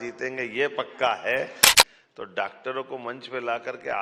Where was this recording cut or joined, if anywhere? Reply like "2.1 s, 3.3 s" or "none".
1.7 s